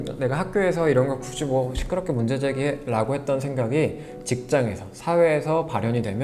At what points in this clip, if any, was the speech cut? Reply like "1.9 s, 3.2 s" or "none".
none